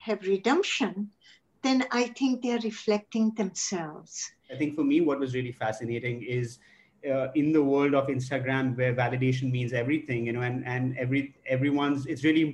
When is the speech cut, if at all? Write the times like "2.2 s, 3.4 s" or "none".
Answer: 4.5 s